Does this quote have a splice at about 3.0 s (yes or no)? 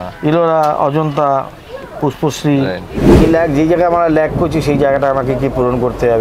yes